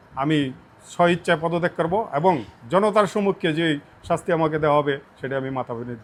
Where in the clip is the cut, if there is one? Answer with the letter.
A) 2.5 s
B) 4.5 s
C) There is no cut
C